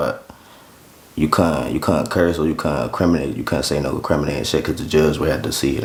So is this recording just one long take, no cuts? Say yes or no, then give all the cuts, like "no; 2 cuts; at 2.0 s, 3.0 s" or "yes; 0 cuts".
yes; 0 cuts